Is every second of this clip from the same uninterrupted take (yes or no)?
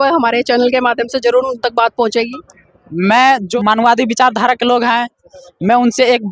no